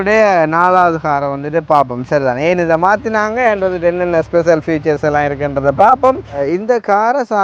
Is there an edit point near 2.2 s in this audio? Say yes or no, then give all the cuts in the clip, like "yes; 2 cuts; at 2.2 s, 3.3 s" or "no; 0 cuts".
no; 1 cut; at 6.4 s